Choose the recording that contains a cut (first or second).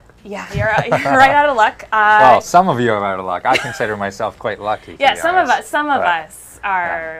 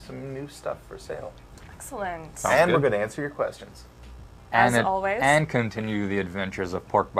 second